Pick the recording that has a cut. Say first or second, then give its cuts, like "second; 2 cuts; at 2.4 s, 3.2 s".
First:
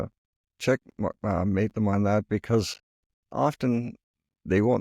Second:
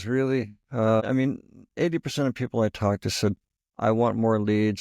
second; 1 cut; at 1.0 s